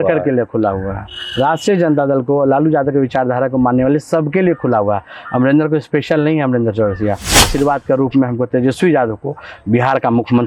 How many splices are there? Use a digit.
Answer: 1